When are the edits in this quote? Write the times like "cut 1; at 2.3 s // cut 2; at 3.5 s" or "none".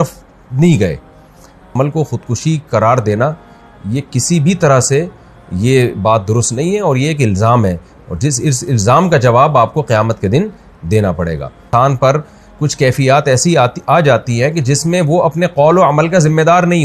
cut 1; at 1.7 s // cut 2; at 11.6 s